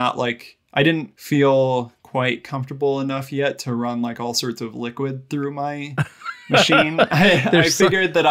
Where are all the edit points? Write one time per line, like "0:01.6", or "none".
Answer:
0:01.1